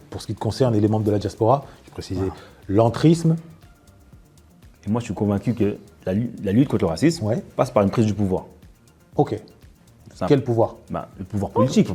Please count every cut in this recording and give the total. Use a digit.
1